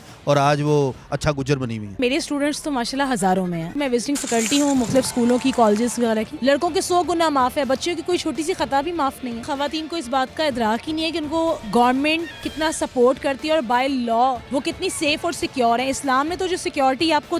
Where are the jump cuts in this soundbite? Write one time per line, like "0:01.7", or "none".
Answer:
0:02.0
0:03.7
0:06.3
0:09.4
0:11.6
0:14.4